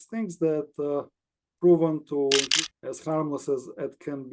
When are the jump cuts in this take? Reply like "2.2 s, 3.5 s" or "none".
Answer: 2.6 s

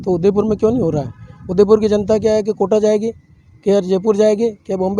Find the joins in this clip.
none

